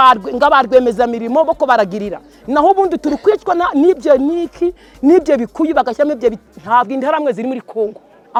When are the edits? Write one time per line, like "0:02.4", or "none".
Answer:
none